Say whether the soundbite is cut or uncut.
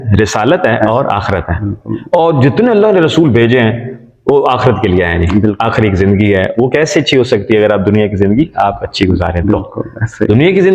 uncut